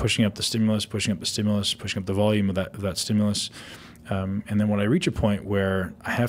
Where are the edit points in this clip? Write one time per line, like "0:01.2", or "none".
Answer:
none